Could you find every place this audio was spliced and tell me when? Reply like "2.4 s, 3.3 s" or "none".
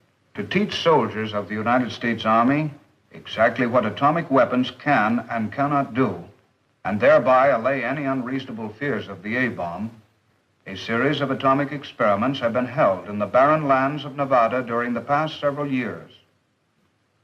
5.1 s